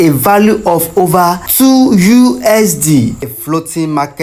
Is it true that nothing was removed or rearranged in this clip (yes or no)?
no